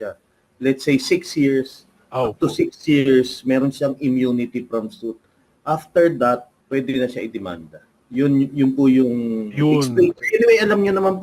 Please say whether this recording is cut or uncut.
cut